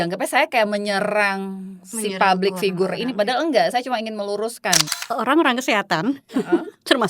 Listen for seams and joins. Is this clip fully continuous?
no; 1 cut; at 4.9 s

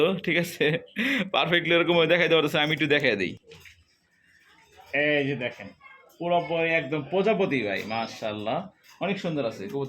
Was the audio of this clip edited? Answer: no; 0 cuts

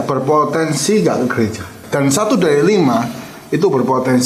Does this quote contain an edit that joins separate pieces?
yes; 1 cut; at 1.8 s

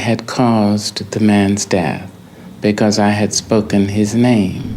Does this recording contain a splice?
no; 0 cuts

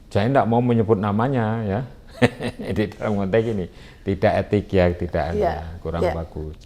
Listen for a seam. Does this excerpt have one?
no; 0 cuts

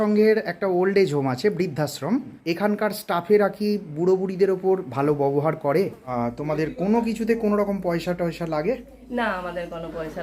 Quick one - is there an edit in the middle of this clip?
yes; 2 cuts; at 2.4 s, 6.1 s

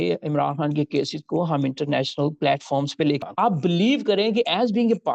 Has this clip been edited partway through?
yes; 1 cut; at 3.2 s

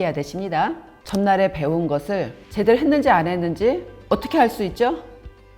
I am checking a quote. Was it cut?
yes; 3 cuts; at 0.9 s, 2.4 s, 3.9 s

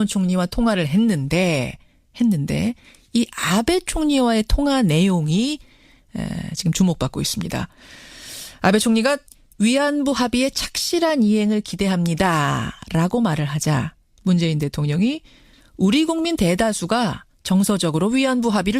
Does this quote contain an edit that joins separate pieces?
yes; 1 cut; at 3.9 s

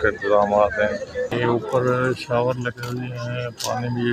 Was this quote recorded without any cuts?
no; 1 cut; at 1.3 s

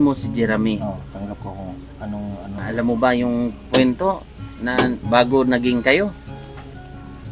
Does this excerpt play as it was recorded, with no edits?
no; 1 cut; at 2.6 s

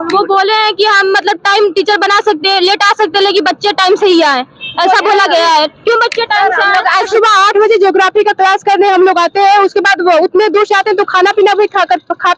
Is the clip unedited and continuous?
no; 1 cut; at 7.1 s

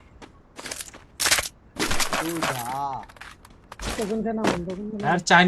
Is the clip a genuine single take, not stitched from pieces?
yes; 0 cuts

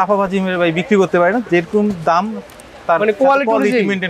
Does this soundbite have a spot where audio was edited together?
no; 0 cuts

